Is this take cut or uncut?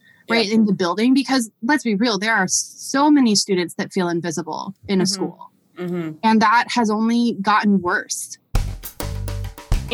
cut